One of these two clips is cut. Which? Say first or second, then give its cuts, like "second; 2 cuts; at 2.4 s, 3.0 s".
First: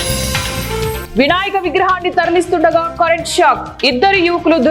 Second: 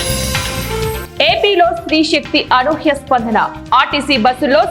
first; 1 cut; at 1.1 s